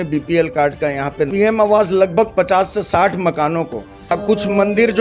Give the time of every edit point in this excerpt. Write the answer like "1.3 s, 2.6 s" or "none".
1.3 s, 4.1 s